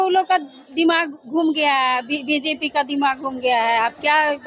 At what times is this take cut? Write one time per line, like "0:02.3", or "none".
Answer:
none